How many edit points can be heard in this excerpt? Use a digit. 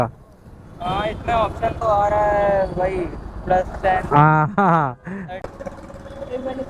1